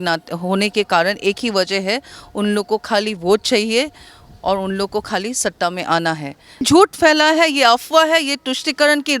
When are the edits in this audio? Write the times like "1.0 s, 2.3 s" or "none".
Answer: 6.5 s